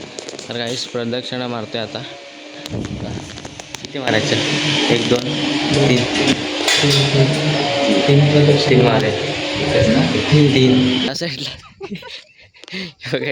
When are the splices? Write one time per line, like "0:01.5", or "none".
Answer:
0:11.1